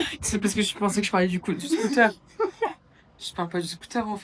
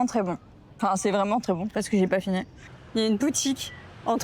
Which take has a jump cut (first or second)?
second